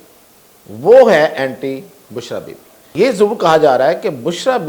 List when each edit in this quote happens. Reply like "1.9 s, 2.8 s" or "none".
2.9 s

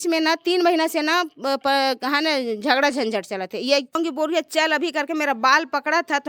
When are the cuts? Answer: 4.0 s

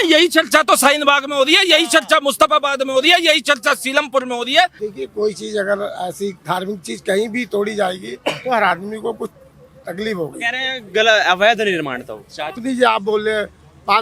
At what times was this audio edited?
4.8 s, 12.6 s

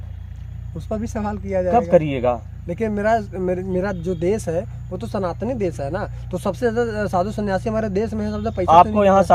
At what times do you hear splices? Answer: none

